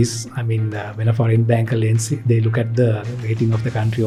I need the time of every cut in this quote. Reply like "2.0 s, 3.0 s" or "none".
none